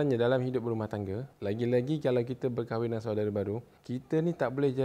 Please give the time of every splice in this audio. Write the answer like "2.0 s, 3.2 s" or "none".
1.3 s, 3.7 s